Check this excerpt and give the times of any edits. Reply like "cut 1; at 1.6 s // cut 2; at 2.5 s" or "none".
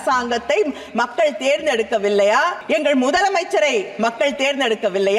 cut 1; at 2.6 s